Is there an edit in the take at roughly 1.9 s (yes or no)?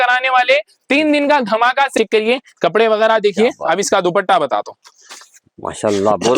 yes